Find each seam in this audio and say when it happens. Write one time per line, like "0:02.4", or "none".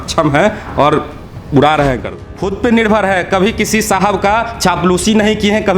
0:02.3